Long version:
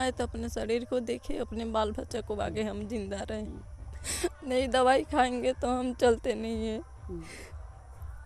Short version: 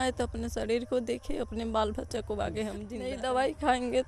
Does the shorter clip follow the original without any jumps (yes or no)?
no